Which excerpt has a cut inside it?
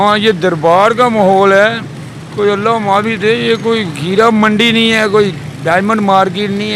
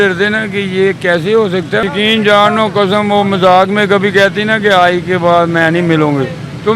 second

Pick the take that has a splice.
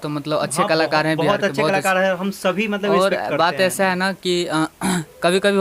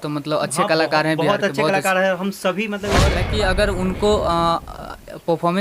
second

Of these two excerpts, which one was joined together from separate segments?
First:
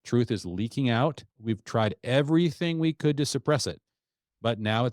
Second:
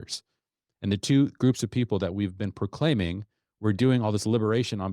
first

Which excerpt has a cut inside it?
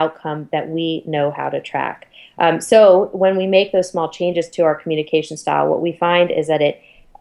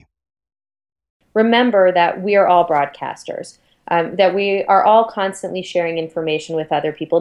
second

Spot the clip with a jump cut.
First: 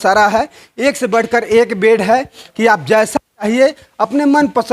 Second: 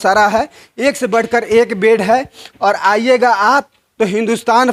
first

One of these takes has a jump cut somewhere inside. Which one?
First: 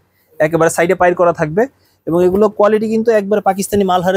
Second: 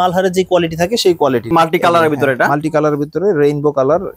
second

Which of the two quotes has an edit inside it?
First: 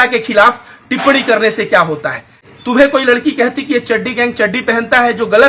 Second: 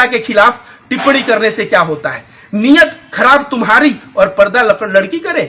first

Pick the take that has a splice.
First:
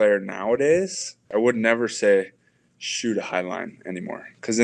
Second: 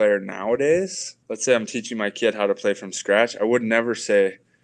first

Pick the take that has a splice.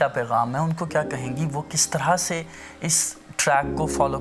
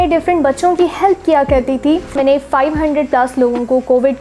second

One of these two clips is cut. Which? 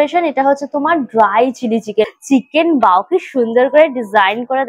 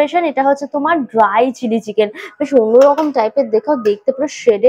first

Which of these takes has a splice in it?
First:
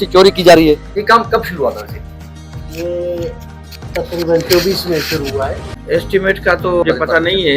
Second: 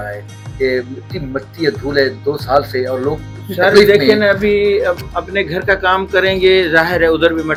first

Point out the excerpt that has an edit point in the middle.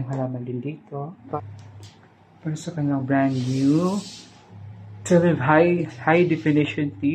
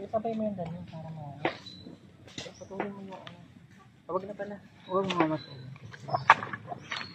first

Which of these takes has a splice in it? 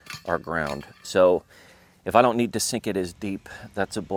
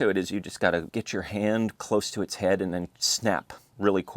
second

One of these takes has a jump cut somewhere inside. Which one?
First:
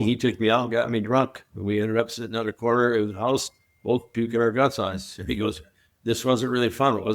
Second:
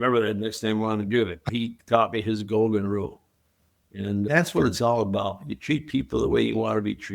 second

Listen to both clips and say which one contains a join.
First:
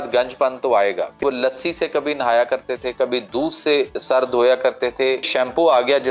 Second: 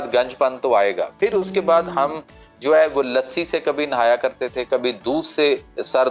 first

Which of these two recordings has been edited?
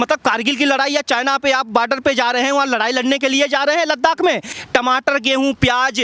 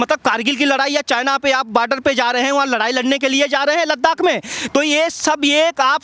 first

